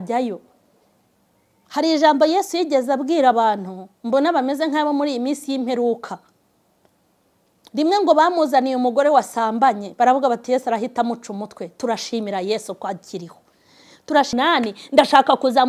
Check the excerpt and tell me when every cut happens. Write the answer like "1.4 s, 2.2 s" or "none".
14.3 s